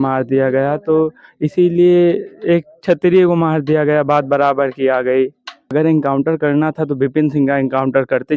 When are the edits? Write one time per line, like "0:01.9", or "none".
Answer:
0:05.6